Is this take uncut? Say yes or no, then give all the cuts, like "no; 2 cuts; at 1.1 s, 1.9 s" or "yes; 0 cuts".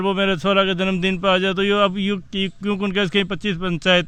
yes; 0 cuts